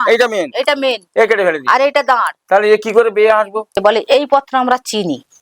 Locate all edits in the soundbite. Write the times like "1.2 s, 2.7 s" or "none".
3.8 s